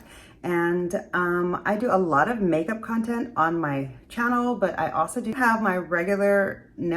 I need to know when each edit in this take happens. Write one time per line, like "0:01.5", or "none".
0:05.3